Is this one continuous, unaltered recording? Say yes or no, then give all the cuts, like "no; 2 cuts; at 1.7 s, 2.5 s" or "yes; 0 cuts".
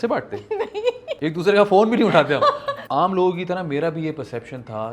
no; 2 cuts; at 1.1 s, 2.7 s